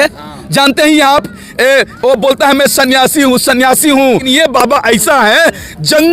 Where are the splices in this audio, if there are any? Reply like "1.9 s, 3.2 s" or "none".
4.3 s